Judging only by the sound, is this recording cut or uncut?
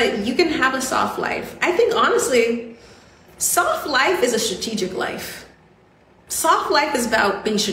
cut